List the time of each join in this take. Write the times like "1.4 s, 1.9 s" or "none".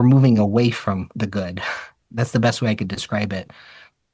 none